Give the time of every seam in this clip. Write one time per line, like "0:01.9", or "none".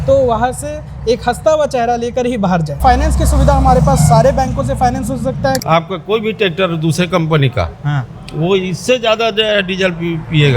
0:02.7
0:05.6